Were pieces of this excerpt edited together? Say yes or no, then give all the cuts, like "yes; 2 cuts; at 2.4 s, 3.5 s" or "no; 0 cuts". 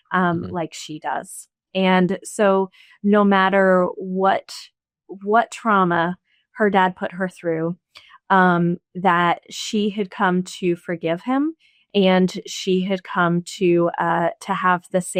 no; 0 cuts